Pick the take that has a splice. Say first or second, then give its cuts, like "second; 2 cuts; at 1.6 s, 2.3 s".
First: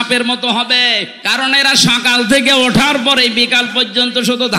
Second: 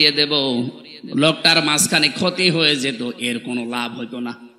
first; 1 cut; at 1.2 s